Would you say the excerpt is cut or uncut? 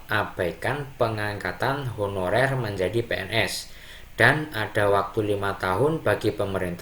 uncut